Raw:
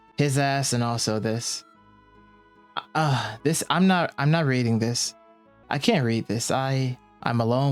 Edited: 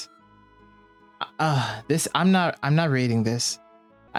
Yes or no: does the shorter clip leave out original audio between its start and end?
no